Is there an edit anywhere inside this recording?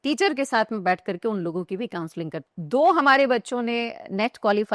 yes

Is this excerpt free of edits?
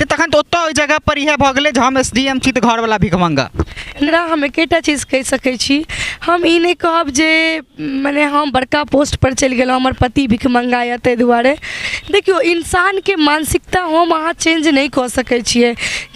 no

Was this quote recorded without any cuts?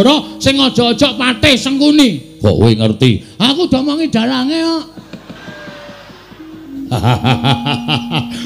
no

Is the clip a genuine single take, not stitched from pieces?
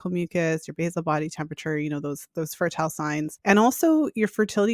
no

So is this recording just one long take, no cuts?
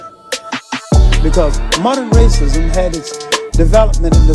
no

